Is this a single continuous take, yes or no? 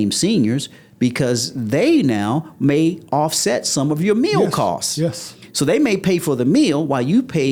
yes